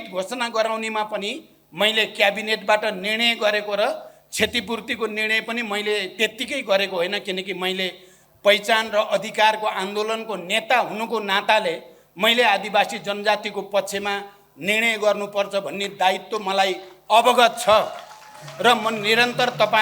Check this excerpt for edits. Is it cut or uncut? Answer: uncut